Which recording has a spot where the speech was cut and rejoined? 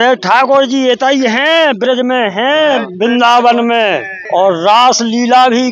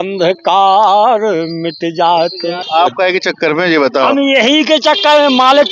second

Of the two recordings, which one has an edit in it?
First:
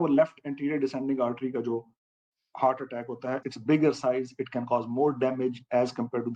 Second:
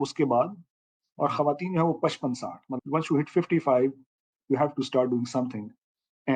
second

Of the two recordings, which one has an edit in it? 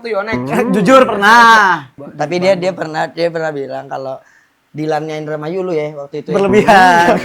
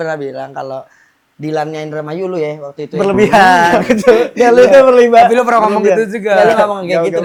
first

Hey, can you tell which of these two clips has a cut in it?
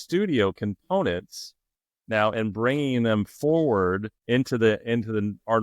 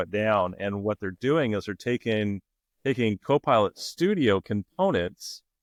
first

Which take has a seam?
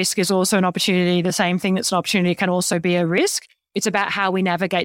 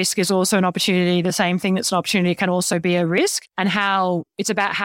first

